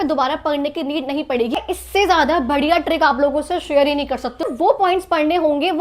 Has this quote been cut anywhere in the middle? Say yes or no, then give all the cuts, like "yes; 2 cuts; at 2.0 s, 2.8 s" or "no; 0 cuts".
yes; 2 cuts; at 1.5 s, 4.5 s